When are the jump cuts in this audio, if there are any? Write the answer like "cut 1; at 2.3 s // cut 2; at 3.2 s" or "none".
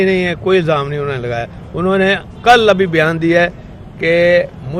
none